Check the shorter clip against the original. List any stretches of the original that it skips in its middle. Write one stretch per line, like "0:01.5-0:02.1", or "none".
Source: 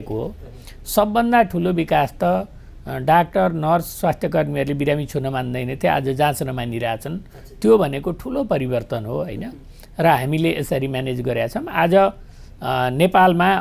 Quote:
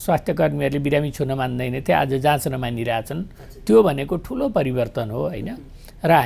none

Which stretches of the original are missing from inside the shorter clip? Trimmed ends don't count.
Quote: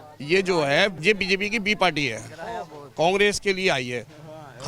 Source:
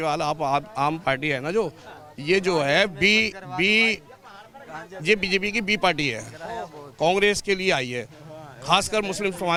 0:02.9-0:05.0

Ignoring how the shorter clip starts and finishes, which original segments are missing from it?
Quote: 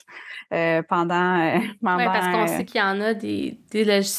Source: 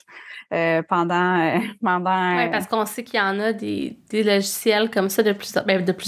0:02.4-0:02.8

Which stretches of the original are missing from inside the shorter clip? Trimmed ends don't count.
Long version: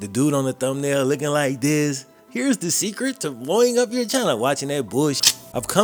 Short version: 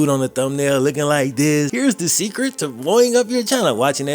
0:02.0-0:02.3

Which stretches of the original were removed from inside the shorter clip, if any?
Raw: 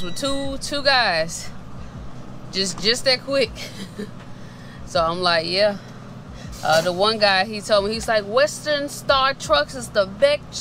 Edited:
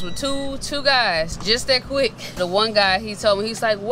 0:01.4-0:02.7
0:03.7-0:06.8

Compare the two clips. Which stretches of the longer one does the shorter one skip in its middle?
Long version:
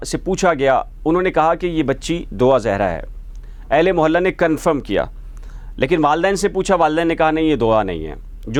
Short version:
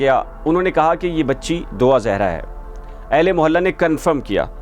none

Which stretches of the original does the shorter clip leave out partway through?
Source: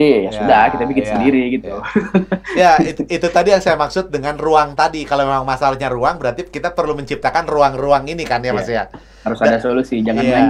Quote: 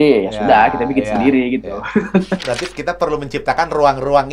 0:02.4-0:06.2

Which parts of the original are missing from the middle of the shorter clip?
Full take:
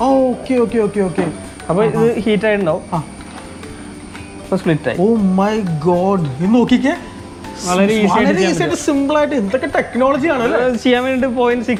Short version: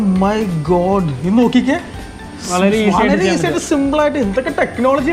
none

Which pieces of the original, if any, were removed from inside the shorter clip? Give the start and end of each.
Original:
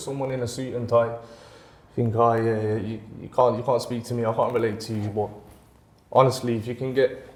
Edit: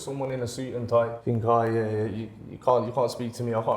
0:01.2-0:01.9

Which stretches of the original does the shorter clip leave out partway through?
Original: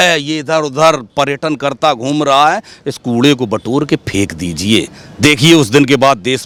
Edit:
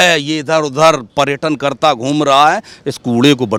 none

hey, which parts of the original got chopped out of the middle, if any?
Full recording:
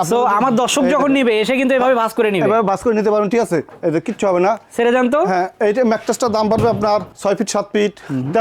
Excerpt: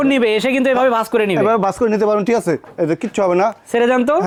none

